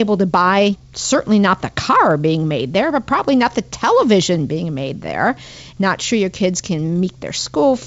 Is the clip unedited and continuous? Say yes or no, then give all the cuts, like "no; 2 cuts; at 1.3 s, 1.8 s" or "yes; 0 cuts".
no; 2 cuts; at 0.9 s, 5.6 s